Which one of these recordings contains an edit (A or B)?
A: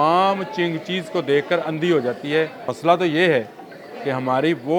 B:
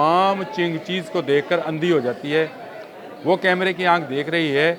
A